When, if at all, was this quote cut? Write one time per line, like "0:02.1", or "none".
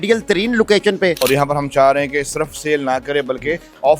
0:01.2